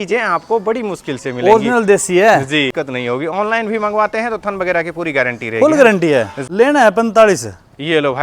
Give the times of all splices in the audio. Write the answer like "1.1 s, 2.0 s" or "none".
2.8 s, 6.4 s